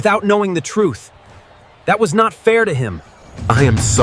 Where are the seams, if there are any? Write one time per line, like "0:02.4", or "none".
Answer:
0:03.0